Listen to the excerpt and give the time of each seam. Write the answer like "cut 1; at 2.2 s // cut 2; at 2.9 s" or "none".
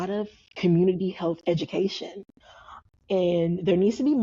cut 1; at 2.8 s